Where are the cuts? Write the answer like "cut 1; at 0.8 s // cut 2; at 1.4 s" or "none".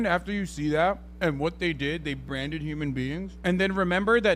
cut 1; at 1.1 s // cut 2; at 3.3 s